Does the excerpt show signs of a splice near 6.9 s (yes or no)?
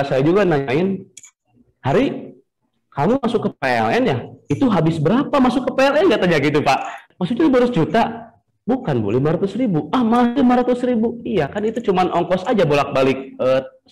yes